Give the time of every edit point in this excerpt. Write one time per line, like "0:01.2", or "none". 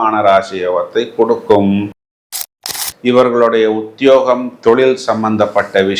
0:02.4